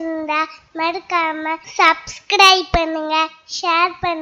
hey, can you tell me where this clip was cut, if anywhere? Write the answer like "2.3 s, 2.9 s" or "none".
1.6 s